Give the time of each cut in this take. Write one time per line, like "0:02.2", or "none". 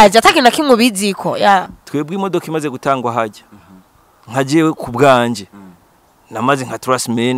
0:01.8